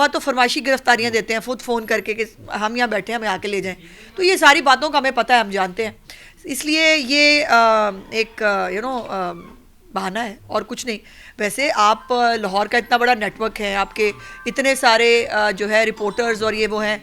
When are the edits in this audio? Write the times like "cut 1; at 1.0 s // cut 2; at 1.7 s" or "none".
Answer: none